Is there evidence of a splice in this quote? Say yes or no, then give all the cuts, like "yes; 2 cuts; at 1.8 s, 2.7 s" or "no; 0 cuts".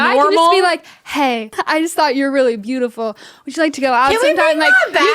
yes; 1 cut; at 1.5 s